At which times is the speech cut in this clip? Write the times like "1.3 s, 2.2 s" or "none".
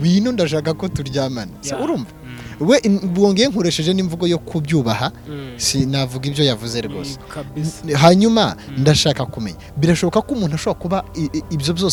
none